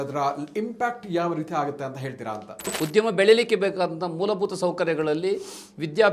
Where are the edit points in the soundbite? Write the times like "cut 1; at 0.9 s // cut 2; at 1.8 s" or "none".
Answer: cut 1; at 2.7 s